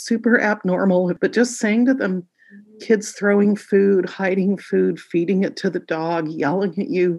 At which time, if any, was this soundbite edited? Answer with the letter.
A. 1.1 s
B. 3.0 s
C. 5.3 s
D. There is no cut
A